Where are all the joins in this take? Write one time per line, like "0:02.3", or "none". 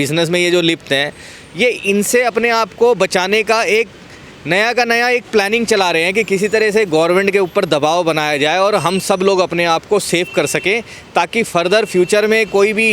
none